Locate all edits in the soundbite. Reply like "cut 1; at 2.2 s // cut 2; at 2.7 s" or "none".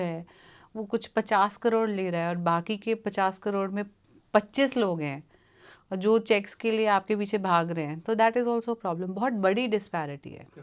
none